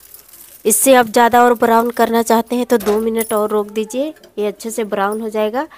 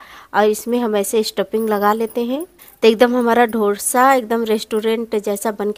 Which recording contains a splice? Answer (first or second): second